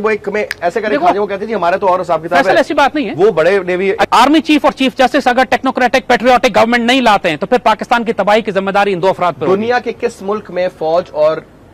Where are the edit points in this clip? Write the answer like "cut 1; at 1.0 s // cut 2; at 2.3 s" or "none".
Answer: cut 1; at 4.1 s